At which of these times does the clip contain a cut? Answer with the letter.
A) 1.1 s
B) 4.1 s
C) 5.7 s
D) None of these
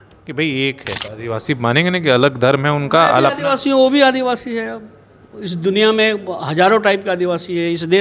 A